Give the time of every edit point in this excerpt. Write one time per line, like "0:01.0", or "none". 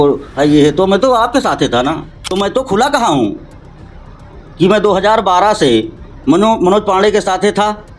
0:02.2